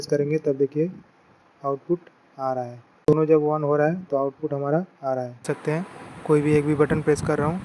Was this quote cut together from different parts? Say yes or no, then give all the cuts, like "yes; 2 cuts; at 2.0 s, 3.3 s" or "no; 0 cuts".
yes; 2 cuts; at 3.1 s, 5.4 s